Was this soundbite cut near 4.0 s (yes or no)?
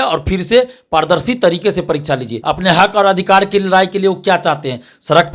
no